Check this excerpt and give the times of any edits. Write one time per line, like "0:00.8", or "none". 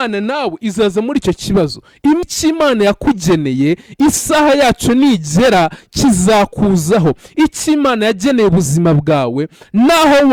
0:02.2